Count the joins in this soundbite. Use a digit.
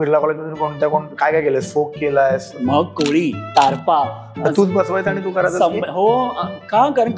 2